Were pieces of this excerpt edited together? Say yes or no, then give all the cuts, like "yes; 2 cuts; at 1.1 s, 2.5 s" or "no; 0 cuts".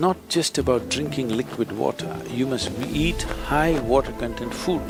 no; 0 cuts